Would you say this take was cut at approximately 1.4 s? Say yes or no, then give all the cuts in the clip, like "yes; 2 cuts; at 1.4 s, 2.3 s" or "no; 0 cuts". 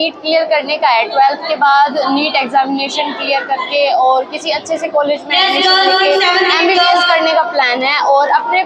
no; 0 cuts